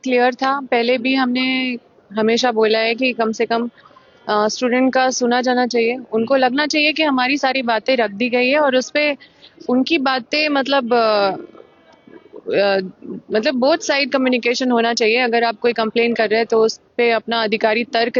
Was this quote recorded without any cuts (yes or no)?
yes